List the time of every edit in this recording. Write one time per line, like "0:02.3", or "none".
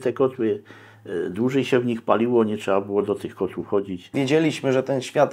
0:04.1